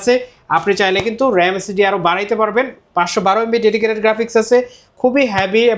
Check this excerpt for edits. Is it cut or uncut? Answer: uncut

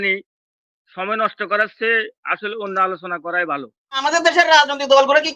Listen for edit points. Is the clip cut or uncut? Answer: cut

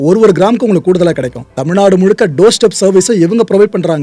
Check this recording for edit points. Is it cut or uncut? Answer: uncut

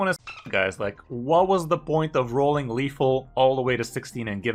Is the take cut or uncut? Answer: uncut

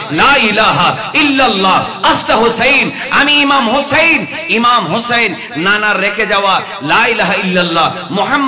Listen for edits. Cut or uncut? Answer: uncut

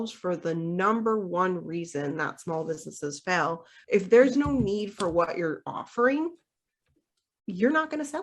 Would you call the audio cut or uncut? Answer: cut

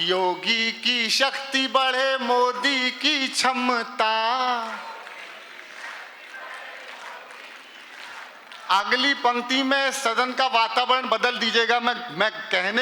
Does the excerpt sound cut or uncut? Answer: uncut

